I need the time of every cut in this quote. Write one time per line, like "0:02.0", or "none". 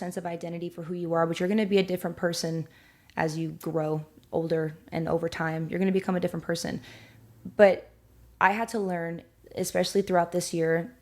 none